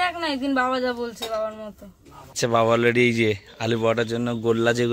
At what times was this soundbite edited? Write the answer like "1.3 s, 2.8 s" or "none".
2.3 s